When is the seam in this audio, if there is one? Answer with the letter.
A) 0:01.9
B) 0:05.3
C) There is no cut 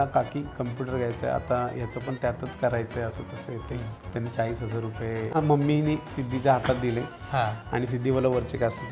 B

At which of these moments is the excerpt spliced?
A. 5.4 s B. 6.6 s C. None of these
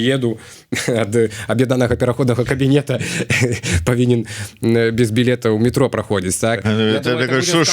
B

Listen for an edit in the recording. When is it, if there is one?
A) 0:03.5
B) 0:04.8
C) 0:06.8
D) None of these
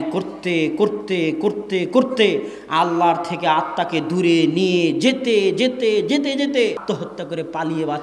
C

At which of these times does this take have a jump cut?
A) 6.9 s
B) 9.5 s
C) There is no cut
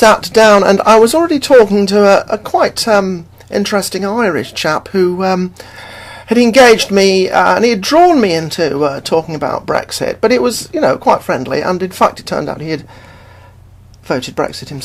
C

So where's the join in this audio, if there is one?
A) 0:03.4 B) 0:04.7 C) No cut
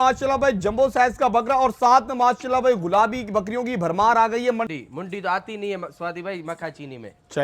B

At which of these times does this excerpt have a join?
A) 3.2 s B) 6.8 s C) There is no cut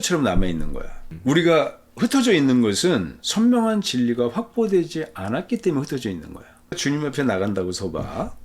B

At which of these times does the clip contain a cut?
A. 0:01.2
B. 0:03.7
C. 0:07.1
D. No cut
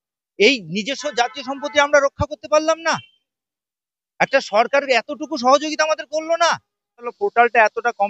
C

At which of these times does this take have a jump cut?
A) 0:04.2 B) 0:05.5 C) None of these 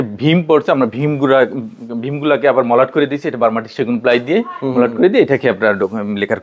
C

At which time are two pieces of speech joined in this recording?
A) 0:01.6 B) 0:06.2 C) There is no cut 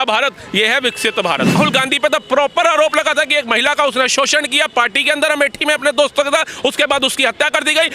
A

